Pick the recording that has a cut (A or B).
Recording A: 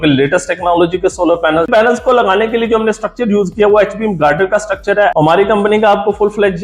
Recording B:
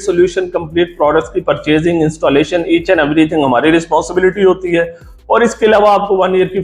A